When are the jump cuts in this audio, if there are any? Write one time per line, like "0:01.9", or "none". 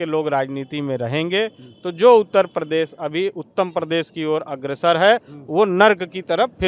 none